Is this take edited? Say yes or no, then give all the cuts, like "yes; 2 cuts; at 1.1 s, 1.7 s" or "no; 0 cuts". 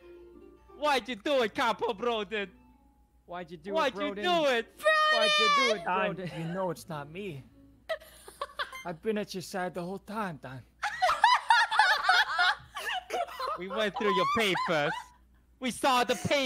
no; 0 cuts